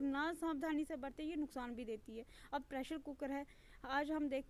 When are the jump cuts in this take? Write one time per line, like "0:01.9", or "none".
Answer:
none